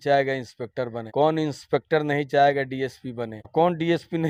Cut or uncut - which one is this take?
uncut